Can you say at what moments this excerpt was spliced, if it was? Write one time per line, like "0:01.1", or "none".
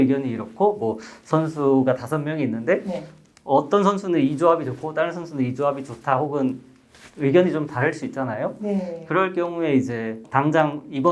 0:10.2